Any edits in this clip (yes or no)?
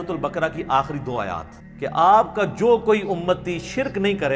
yes